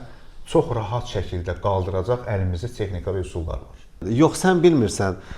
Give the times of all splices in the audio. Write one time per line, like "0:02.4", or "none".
0:04.0